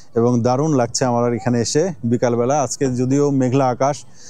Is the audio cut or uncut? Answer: uncut